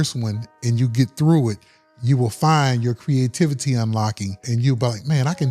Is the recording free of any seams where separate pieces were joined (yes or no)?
no